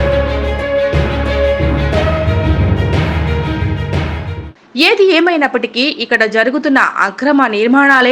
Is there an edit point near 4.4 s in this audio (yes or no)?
yes